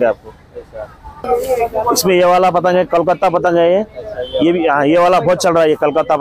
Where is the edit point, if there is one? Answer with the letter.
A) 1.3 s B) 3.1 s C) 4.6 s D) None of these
A